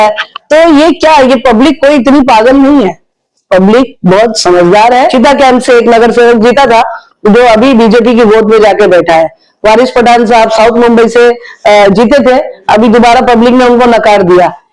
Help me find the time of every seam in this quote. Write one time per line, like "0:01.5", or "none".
0:05.0